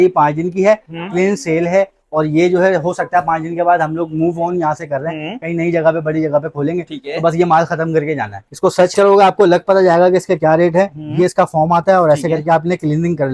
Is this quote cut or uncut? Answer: cut